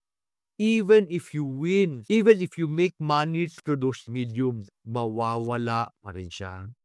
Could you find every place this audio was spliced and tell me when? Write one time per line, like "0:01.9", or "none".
0:02.0